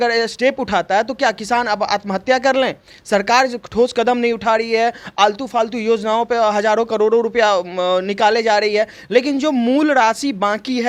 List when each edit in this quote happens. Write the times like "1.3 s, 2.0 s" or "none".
none